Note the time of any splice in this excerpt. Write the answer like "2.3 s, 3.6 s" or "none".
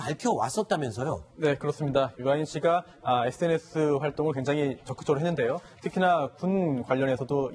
4.7 s